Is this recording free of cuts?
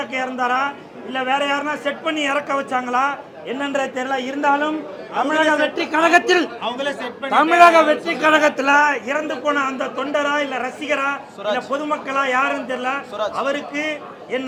yes; 0 cuts

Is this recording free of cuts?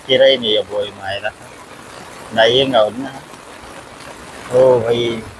yes; 0 cuts

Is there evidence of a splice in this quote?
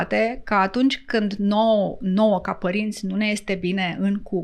no; 0 cuts

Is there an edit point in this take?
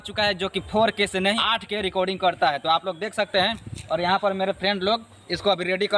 yes; 1 cut; at 1.4 s

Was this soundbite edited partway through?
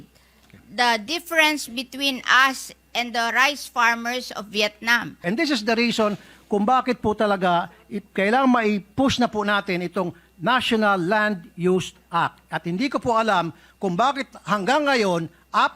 yes; 1 cut; at 5.2 s

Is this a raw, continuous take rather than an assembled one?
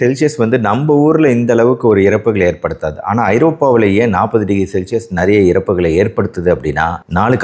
yes; 0 cuts

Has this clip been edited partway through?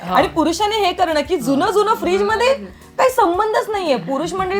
no; 0 cuts

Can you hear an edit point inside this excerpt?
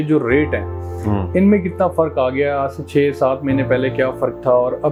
no; 0 cuts

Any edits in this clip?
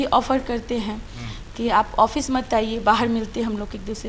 no; 0 cuts

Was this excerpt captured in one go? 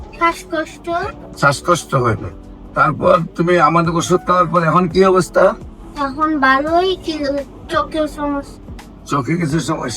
no; 1 cut; at 1.2 s

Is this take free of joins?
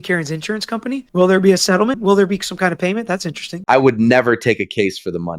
no; 3 cuts; at 1.1 s, 2.0 s, 3.5 s

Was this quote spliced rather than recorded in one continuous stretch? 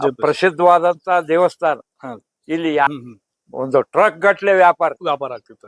yes; 1 cut; at 2.9 s

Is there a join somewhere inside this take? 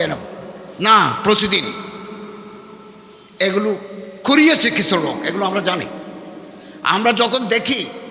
no; 0 cuts

